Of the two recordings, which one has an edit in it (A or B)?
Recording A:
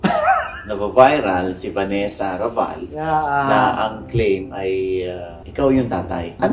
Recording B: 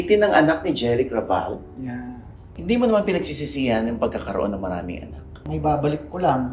B